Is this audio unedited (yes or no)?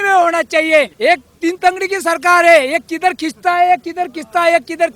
no